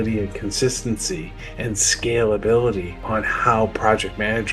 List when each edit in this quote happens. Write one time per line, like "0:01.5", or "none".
0:02.9